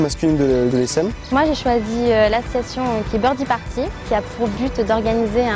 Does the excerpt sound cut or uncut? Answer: cut